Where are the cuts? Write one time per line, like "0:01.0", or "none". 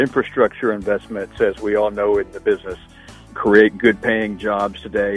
0:03.2